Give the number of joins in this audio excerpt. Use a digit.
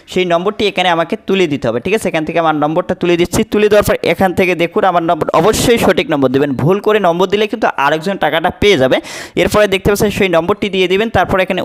0